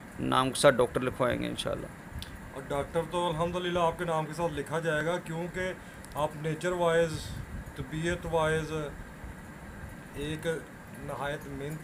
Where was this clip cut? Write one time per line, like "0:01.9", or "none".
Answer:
none